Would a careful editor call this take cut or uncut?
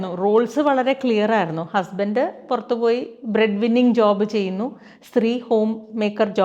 uncut